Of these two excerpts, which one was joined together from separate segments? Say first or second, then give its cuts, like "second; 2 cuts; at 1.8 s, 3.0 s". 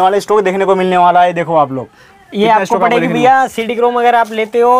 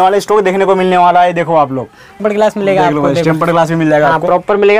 second; 1 cut; at 2.2 s